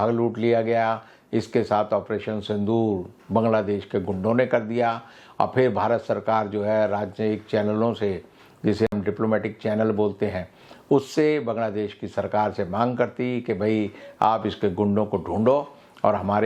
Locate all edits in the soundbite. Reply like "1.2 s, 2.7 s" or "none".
none